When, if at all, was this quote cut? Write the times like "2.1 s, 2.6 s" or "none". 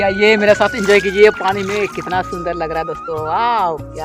none